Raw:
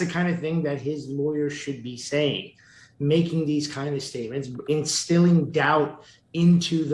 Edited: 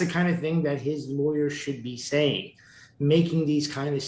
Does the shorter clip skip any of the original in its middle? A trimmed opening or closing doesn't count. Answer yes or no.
no